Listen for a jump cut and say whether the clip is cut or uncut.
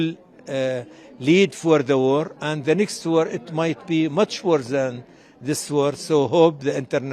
uncut